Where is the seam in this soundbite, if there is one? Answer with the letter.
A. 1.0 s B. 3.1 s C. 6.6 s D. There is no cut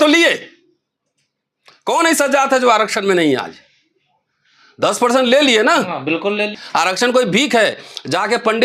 C